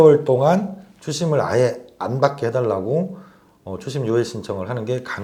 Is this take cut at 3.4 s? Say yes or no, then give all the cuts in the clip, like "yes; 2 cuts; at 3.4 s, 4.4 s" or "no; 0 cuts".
no; 0 cuts